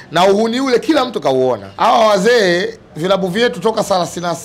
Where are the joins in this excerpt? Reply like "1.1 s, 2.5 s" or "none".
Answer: 1.7 s